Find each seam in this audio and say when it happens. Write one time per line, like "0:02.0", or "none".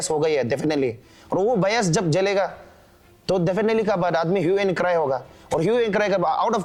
none